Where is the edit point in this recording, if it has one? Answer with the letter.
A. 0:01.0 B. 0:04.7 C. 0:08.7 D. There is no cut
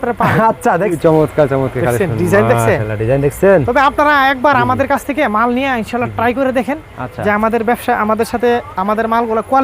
A